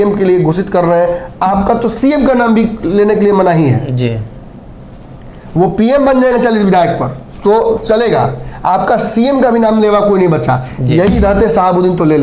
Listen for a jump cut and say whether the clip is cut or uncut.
uncut